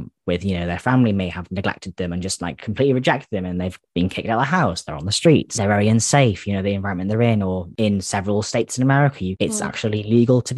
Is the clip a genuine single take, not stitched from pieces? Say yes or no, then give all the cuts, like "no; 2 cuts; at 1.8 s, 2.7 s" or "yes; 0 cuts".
no; 3 cuts; at 5.5 s, 7.7 s, 9.3 s